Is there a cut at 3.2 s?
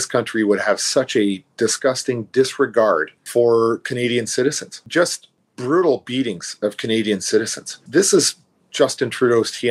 yes; 2 cuts; at 3.2 s, 4.7 s

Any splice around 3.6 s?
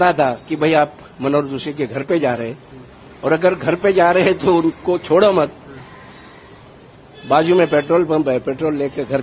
no; 0 cuts

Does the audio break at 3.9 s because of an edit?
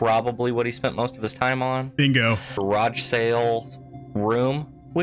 no; 1 cut; at 2.6 s

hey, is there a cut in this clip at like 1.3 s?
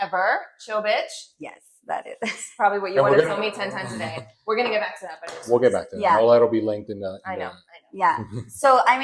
no; 0 cuts

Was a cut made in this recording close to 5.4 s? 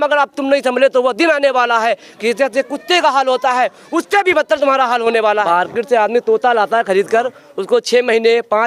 yes; 1 cut; at 5.4 s

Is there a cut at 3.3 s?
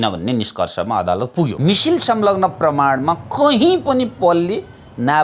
no; 1 cut; at 1.5 s

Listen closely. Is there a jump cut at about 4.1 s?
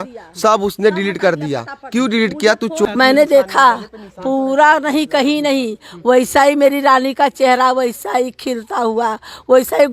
no; 1 cut; at 2.9 s

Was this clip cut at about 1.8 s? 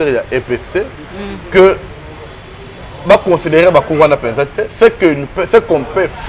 no; 0 cuts

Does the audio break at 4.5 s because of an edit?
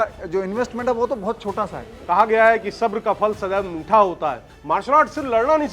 yes; 2 cuts; at 2.0 s, 4.5 s

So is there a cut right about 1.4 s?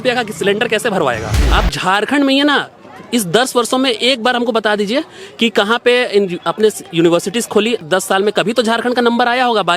yes; 2 cuts; at 1.4 s, 7.8 s

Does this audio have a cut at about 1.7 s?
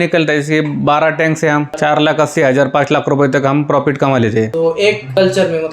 yes; 2 cuts; at 1.7 s, 4.7 s

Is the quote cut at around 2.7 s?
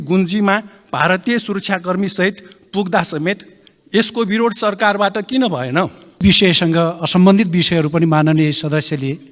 no; 1 cut; at 6.2 s

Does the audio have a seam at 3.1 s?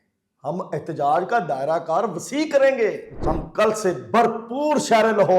yes; 1 cut; at 3.1 s

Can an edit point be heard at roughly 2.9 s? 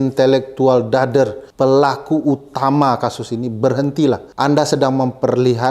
no; 2 cuts; at 1.4 s, 4.3 s

